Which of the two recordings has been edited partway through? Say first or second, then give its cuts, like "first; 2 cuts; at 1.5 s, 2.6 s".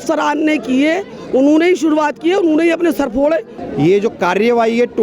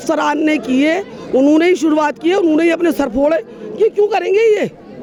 first; 1 cut; at 3.6 s